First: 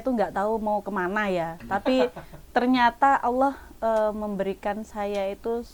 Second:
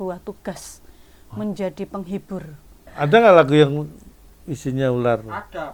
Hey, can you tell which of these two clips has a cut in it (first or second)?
second